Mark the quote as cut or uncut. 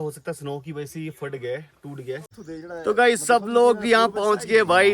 cut